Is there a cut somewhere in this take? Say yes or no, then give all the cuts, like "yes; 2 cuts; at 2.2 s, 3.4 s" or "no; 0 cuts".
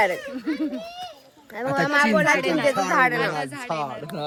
no; 0 cuts